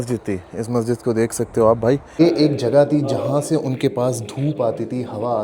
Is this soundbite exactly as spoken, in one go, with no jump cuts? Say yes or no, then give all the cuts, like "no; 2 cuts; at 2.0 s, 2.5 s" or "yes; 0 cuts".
no; 1 cut; at 2.1 s